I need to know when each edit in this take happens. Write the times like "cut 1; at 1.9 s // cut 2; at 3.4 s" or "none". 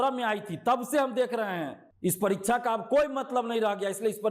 cut 1; at 1.8 s